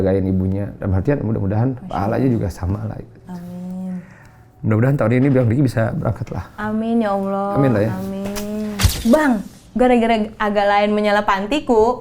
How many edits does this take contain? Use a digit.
1